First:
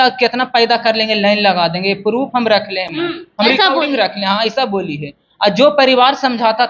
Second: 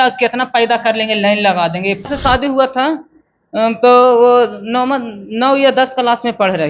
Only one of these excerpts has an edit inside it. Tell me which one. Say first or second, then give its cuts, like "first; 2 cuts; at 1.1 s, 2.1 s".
second; 1 cut; at 2.1 s